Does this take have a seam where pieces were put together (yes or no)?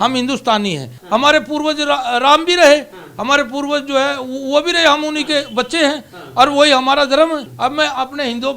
yes